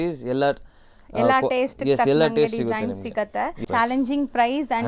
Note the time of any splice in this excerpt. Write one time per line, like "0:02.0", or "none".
0:03.6